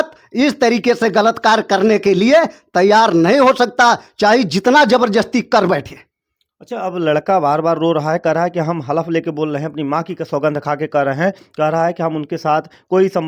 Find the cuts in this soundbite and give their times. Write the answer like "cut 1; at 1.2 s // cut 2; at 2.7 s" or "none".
none